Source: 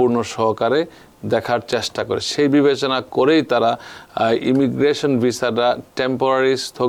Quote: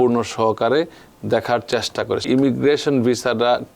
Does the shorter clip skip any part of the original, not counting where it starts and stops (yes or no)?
yes